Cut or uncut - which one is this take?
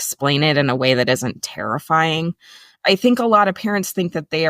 cut